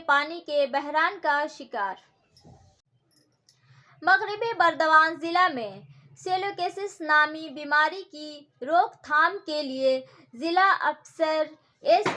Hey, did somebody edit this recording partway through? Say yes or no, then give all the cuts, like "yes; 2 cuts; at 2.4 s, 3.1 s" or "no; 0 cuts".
yes; 1 cut; at 2.9 s